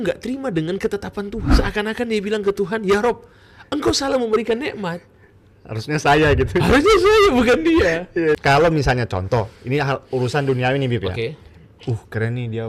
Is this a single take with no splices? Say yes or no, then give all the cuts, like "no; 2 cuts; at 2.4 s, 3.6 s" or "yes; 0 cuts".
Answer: no; 2 cuts; at 1.5 s, 8.4 s